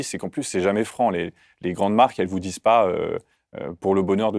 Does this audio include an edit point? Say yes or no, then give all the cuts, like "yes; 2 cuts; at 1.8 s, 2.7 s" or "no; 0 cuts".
no; 0 cuts